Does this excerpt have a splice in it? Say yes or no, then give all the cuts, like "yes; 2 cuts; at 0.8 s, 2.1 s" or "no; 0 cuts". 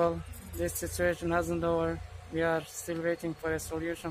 no; 0 cuts